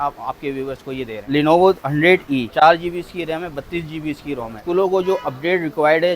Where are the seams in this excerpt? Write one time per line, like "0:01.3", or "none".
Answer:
0:01.3
0:02.5
0:04.6